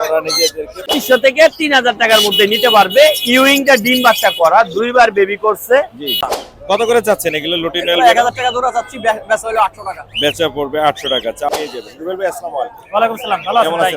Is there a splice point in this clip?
yes; 3 cuts; at 0.9 s, 6.4 s, 11.5 s

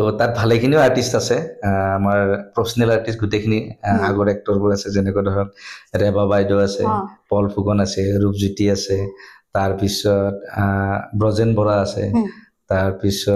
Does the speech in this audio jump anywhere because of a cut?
no; 0 cuts

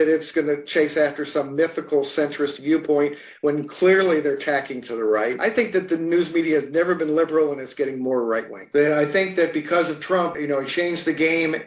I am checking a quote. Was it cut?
yes; 2 cuts; at 5.4 s, 8.6 s

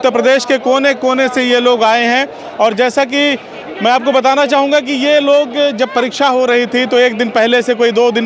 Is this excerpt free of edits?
yes; 0 cuts

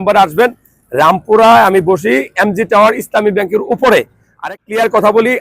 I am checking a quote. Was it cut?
yes; 1 cut; at 4.5 s

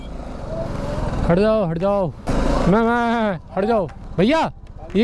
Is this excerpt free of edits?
no; 2 cuts; at 2.3 s, 4.1 s

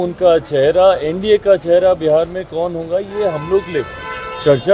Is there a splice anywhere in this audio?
no; 0 cuts

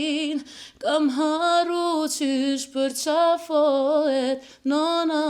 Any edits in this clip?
no; 0 cuts

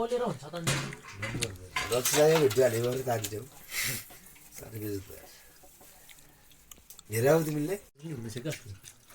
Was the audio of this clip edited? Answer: yes; 1 cut; at 1.9 s

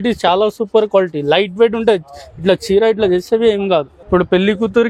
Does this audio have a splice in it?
yes; 1 cut; at 4.0 s

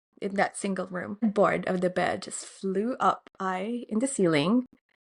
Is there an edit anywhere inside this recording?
yes; 1 cut; at 1.2 s

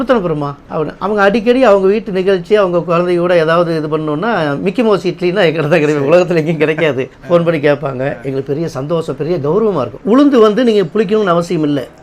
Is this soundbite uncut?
no; 1 cut; at 10.0 s

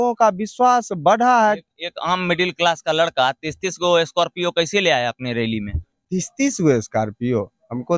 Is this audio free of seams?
yes; 0 cuts

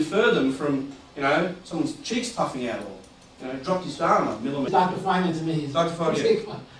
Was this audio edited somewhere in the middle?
no; 0 cuts

